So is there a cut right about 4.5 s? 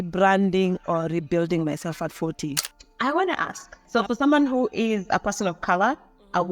no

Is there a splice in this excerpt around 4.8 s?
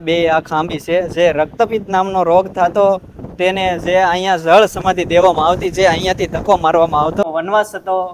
no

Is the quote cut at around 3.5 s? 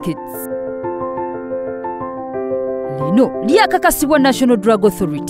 no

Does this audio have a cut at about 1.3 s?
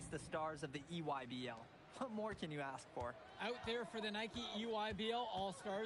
no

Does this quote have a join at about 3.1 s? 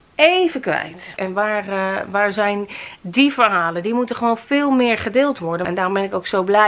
no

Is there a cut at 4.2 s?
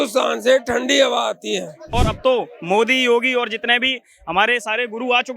no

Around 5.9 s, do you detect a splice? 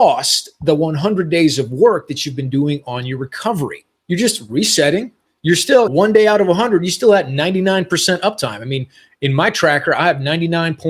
yes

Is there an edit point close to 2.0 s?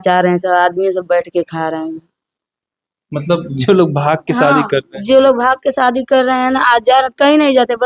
no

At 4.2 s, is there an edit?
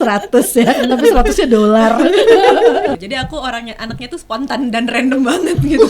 no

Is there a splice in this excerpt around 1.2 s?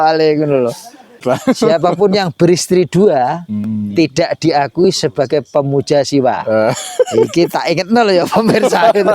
yes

